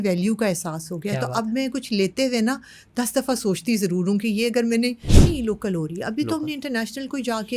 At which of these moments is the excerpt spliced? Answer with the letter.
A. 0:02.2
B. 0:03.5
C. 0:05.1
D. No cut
C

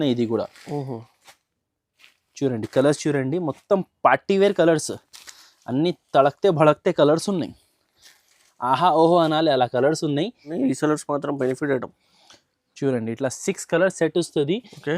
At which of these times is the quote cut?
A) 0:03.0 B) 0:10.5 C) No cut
B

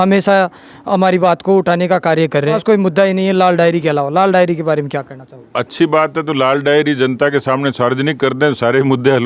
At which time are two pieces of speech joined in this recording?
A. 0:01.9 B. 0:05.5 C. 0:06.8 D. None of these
D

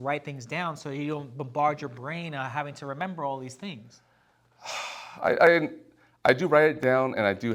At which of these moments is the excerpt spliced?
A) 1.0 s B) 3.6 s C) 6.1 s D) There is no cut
D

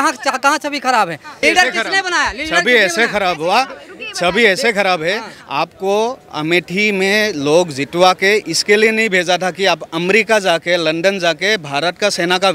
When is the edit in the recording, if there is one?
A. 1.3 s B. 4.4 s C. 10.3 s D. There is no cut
A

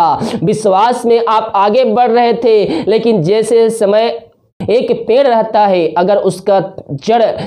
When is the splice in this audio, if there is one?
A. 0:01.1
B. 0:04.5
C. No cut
B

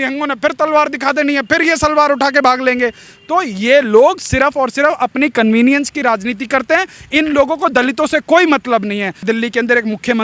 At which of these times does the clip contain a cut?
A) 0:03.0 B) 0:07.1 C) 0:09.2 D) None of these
C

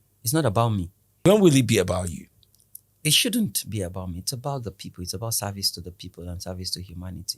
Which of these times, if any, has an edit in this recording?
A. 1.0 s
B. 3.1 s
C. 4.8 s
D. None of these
A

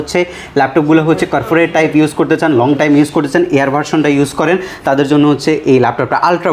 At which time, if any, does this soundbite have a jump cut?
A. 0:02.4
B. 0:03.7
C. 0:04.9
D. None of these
D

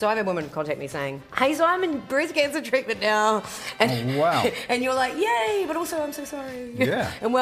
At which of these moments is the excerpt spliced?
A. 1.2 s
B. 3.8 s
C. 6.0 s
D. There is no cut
A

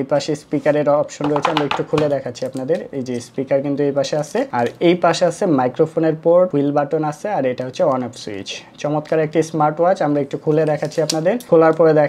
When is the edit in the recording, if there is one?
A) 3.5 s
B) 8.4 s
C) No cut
C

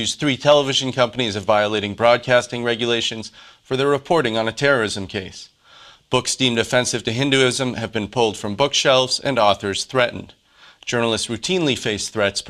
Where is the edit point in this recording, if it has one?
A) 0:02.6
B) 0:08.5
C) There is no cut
B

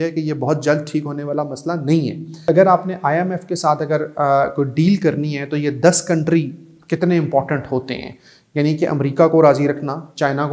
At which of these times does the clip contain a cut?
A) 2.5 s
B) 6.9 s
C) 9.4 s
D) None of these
A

